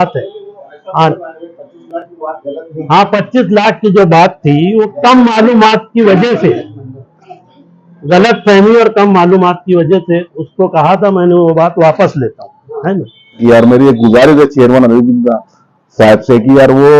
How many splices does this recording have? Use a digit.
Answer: 1